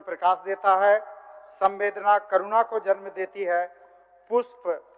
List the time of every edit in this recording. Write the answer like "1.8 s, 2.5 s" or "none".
none